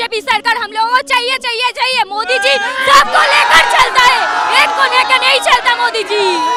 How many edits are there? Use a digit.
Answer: 0